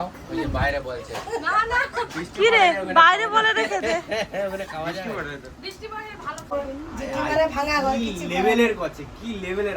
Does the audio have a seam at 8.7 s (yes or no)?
no